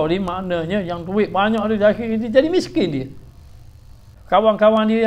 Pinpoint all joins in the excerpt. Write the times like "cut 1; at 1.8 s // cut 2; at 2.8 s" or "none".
cut 1; at 4.1 s